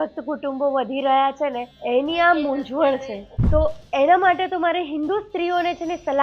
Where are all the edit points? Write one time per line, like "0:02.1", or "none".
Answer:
0:01.7
0:03.1